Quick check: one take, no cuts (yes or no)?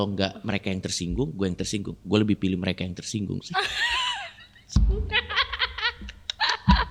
yes